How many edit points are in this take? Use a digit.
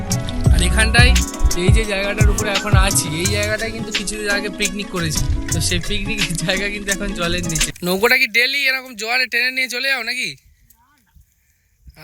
2